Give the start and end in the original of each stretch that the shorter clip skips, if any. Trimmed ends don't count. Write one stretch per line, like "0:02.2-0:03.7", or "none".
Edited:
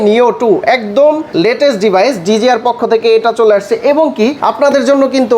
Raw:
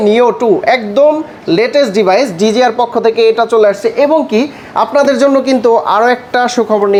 0:01.3-0:01.4
0:04.5-0:04.7